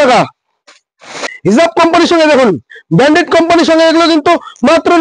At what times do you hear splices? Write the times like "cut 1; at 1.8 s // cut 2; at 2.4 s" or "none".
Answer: cut 1; at 1.3 s